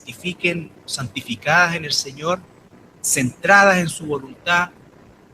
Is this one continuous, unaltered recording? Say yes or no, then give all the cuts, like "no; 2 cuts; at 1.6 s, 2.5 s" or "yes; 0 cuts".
no; 1 cut; at 2.6 s